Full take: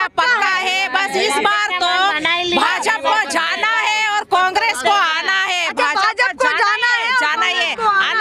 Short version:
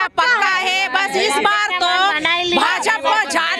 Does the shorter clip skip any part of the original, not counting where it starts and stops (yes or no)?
no